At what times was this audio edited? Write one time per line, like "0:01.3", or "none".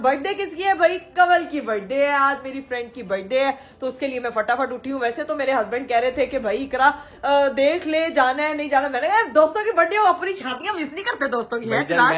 none